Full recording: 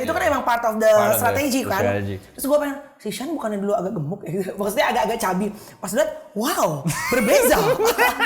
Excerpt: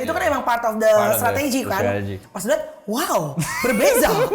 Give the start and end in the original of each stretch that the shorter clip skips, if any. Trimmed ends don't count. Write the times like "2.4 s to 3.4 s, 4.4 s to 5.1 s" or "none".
2.2 s to 5.7 s